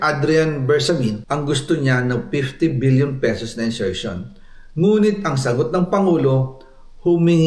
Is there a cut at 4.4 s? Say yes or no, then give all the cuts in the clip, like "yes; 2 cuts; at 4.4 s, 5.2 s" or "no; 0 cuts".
no; 1 cut; at 1.2 s